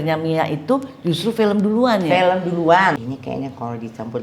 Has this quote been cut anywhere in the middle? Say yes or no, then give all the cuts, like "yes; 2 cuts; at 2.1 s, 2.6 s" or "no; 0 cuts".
yes; 1 cut; at 3.1 s